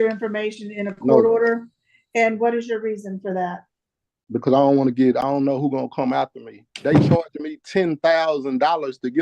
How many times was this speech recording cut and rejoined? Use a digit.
1